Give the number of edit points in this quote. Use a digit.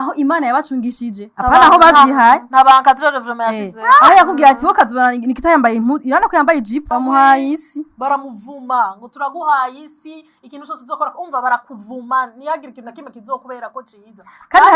1